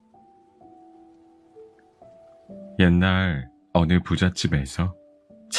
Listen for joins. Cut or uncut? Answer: uncut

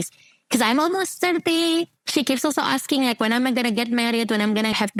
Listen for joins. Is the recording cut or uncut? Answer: uncut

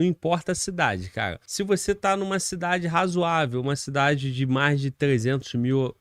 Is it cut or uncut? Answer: cut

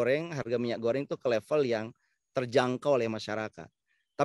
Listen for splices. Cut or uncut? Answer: uncut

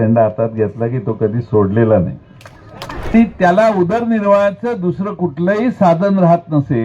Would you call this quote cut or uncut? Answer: cut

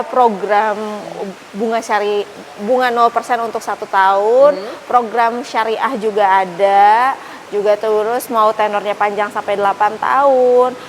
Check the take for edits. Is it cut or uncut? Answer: uncut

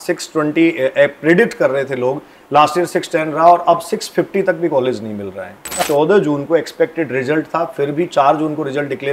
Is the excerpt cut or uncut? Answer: cut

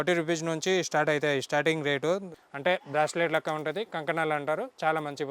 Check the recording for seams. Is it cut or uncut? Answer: cut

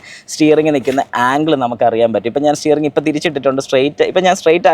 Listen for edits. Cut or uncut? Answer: uncut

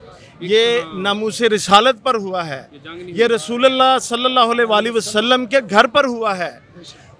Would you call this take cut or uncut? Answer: uncut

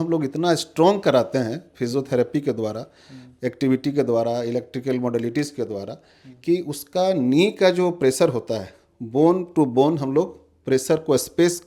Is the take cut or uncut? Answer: uncut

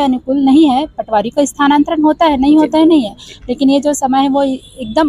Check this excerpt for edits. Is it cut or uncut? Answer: uncut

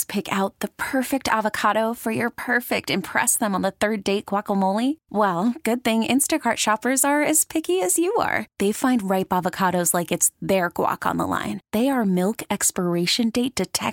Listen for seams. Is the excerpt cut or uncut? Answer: uncut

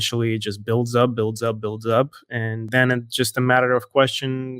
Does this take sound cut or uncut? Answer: cut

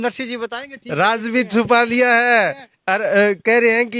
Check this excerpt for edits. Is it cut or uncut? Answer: uncut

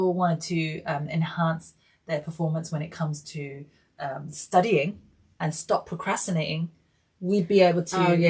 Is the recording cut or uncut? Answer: uncut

